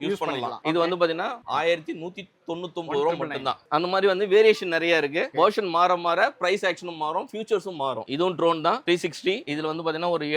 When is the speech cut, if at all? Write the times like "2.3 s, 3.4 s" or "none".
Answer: 8.1 s, 9.5 s

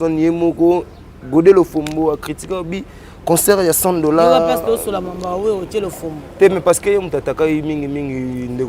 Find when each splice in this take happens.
none

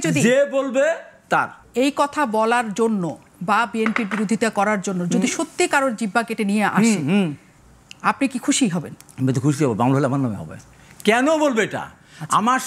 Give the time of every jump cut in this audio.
1.6 s

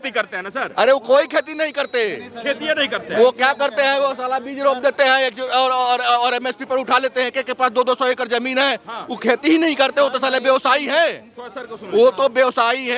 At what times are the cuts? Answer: none

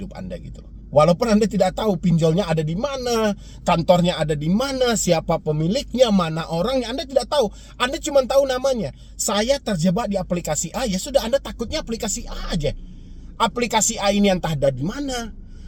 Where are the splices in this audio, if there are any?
none

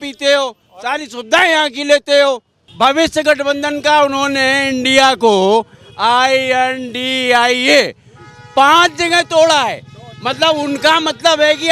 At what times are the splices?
2.6 s

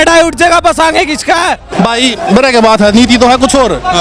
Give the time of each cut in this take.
1.7 s

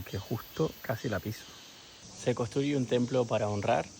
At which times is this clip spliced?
2.0 s

